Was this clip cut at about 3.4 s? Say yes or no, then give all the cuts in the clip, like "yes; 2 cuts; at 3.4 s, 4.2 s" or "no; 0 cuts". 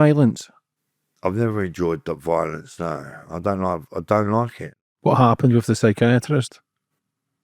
no; 1 cut; at 4.6 s